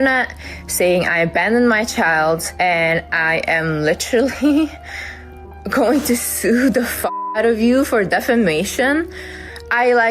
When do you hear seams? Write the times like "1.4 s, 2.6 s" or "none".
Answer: 2.5 s